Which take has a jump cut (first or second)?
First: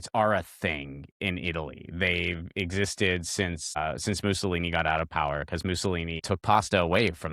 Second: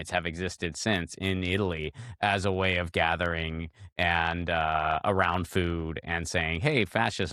first